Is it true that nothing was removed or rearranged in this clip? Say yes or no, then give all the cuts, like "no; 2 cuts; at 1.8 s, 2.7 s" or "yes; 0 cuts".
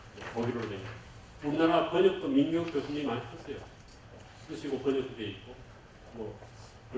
yes; 0 cuts